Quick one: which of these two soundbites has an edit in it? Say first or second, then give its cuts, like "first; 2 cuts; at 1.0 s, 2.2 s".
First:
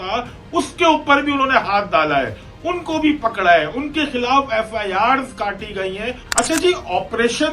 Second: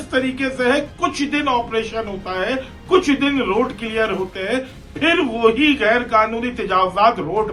first; 1 cut; at 6.4 s